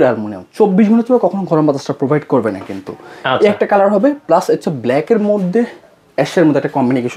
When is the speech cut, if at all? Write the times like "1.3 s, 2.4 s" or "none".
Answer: none